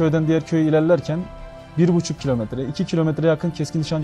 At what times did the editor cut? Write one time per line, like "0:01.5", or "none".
none